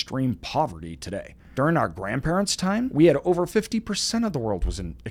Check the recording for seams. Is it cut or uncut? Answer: cut